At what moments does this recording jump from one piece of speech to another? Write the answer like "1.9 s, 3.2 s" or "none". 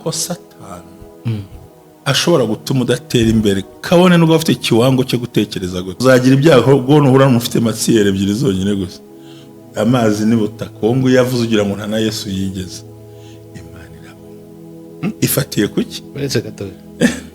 5.9 s